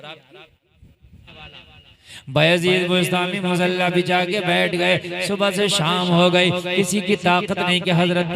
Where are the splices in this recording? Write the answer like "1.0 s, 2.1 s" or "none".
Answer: 1.3 s